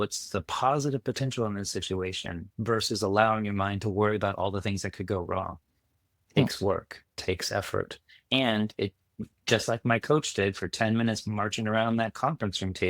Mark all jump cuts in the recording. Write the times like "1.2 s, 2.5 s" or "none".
none